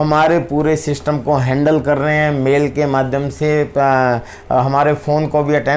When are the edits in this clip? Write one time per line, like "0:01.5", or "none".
none